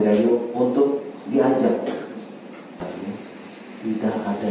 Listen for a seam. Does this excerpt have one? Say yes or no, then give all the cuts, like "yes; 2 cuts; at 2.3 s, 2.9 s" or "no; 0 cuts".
yes; 1 cut; at 2.9 s